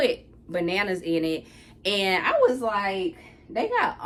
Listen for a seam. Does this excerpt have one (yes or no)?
no